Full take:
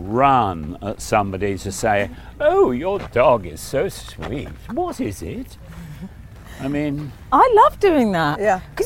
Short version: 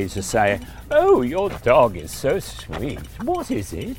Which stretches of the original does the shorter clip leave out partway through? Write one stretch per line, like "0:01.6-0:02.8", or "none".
none